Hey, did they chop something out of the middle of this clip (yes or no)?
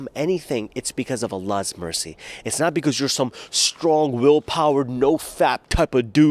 no